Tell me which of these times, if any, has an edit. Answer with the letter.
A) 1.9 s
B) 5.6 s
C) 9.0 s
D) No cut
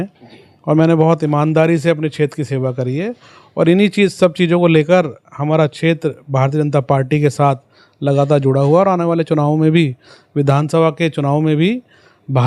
D